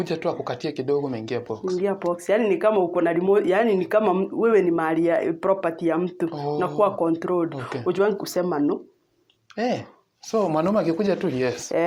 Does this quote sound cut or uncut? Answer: uncut